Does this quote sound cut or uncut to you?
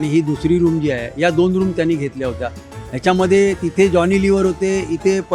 uncut